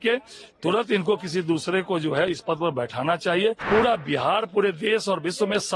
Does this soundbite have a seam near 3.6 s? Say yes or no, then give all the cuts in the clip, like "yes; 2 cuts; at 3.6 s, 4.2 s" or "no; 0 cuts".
yes; 1 cut; at 3.6 s